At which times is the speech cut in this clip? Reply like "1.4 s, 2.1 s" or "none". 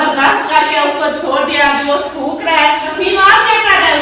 2.9 s